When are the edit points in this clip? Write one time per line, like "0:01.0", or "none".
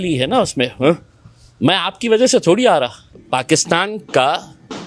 0:03.2

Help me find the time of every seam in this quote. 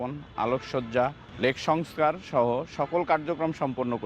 0:01.2

